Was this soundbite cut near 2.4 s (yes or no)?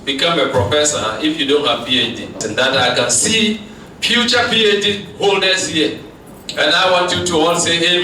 yes